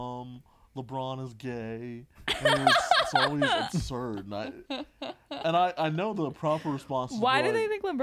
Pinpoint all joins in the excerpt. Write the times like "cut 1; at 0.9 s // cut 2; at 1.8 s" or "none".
none